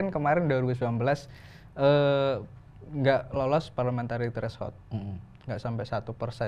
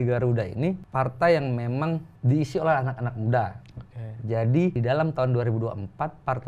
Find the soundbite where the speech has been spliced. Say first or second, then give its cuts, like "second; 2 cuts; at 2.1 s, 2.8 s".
second; 3 cuts; at 0.8 s, 2.1 s, 4.8 s